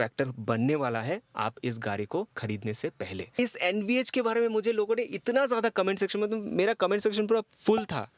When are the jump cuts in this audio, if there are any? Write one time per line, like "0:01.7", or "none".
0:03.4